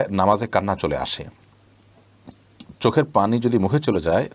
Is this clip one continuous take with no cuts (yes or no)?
yes